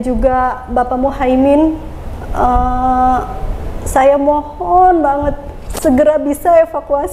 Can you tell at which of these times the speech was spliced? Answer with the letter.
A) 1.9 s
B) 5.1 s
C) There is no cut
C